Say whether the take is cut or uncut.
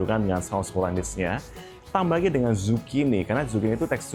uncut